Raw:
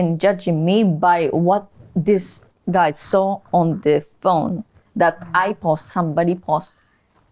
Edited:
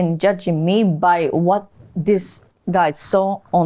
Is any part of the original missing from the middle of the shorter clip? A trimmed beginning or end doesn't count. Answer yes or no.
no